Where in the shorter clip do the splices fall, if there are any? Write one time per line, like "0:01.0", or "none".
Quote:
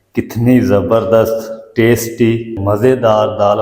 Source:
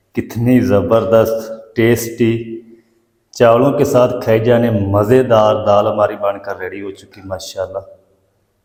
0:02.6